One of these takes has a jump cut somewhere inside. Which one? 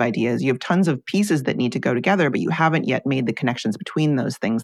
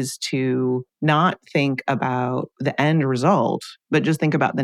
second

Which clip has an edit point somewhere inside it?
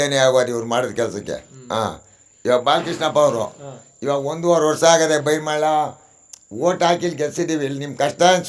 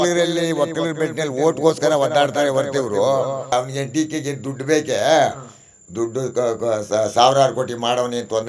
second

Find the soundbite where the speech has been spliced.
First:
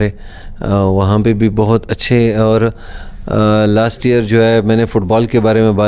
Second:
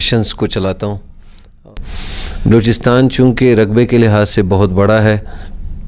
second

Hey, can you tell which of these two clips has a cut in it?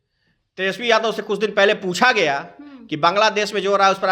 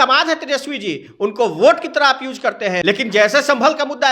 second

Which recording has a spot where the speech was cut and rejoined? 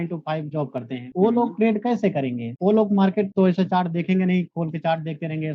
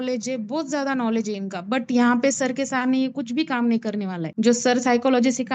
first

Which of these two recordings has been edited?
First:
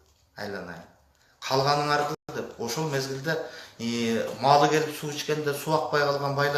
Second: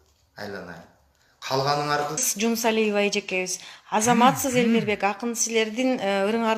second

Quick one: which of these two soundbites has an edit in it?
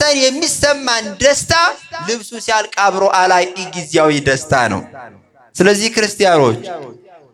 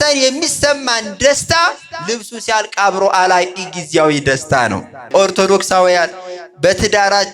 second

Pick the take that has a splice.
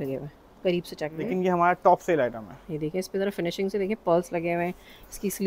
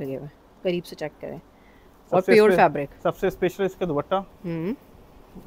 first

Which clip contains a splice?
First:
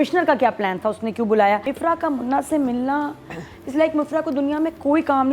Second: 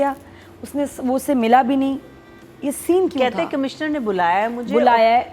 first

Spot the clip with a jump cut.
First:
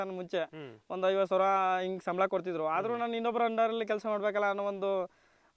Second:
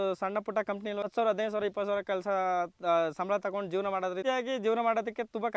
second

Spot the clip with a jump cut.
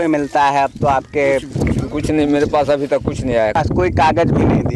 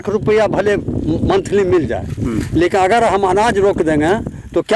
first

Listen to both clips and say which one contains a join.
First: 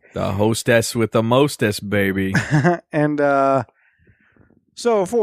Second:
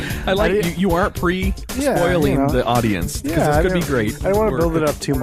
first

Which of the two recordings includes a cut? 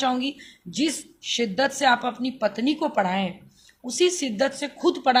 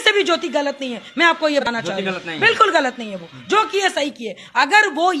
second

